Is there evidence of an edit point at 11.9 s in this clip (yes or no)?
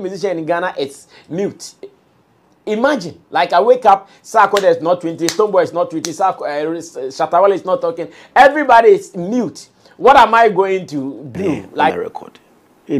yes